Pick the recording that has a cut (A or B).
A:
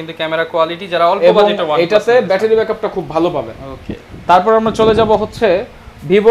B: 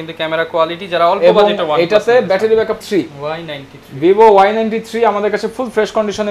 B